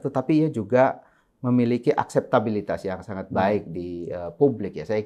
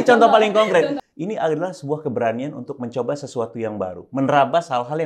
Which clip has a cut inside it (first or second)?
second